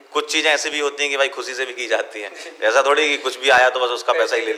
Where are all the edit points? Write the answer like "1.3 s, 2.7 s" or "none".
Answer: none